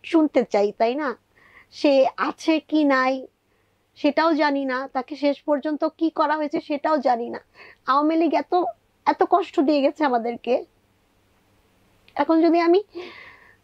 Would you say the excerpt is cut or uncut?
uncut